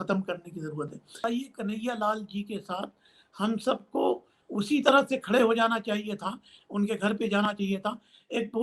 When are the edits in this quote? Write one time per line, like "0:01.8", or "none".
0:01.2